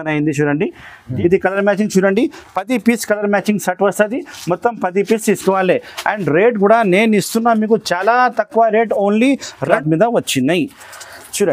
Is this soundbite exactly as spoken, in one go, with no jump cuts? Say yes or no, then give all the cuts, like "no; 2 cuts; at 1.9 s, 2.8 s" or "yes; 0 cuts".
no; 2 cuts; at 1.1 s, 9.7 s